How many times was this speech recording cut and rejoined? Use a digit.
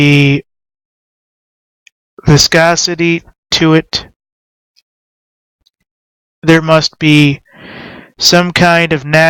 1